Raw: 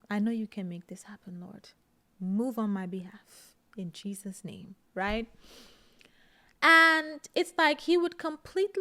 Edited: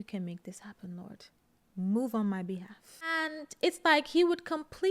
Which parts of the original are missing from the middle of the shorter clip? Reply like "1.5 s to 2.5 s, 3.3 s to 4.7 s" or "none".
3.7 s to 7.0 s